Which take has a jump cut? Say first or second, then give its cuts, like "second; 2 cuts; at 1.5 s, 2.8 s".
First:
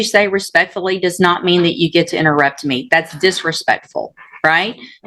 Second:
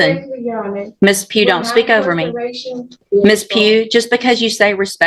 second; 1 cut; at 3.0 s